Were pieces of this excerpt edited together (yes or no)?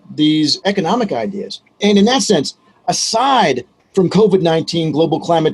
yes